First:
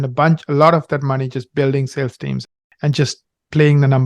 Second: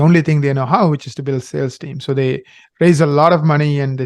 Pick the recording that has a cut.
first; 1 cut; at 2.4 s

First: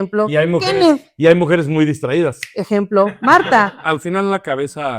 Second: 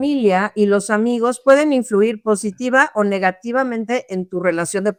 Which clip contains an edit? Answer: first; 1 cut; at 3.8 s

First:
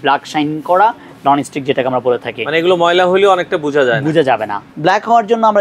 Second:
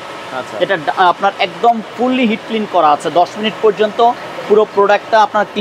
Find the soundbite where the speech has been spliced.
first; 1 cut; at 4.6 s

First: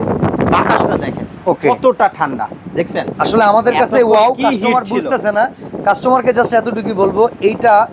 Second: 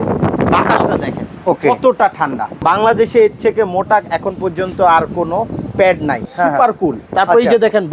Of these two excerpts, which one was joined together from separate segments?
second; 2 cuts; at 2.6 s, 6.2 s

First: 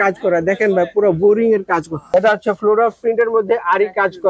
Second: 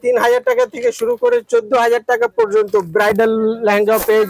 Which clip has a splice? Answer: first; 1 cut; at 2.0 s

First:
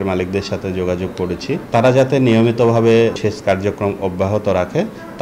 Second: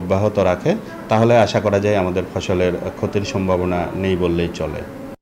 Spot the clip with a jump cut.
first; 2 cuts; at 1.6 s, 3.2 s

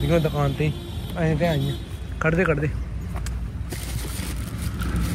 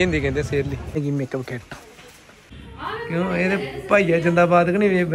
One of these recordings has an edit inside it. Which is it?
second; 2 cuts; at 1.0 s, 2.7 s

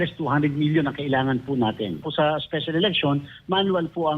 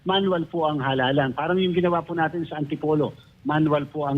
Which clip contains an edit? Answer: first; 1 cut; at 2.1 s

